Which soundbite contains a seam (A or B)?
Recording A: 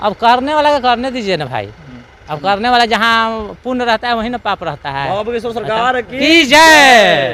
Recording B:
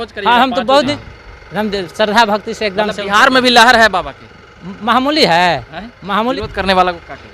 B